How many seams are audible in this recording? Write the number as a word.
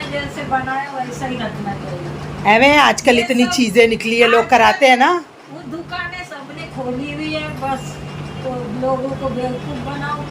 one